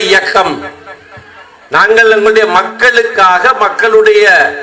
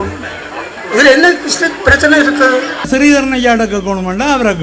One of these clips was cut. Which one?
second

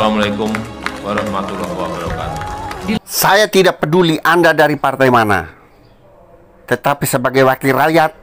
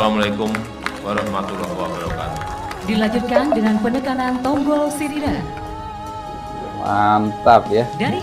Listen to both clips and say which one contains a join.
first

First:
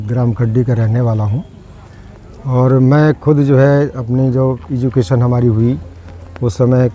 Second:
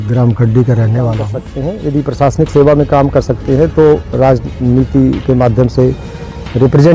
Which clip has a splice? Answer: second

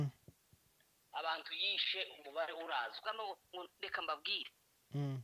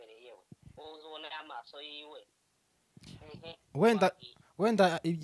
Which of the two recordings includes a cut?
first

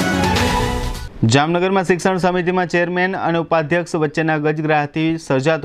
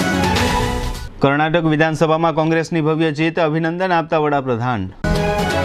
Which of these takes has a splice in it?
first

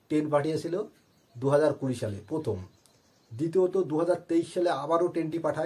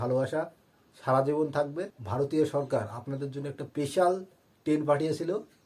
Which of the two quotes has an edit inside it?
second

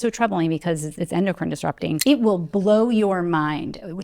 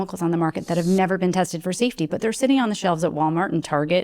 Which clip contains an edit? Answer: first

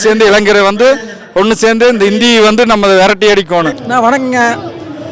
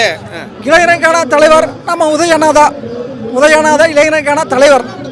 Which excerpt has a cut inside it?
first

